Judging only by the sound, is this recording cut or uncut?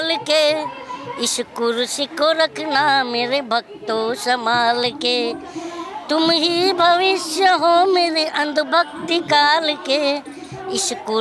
uncut